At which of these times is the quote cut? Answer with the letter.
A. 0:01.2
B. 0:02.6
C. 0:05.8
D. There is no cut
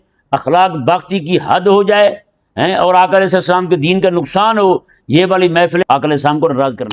C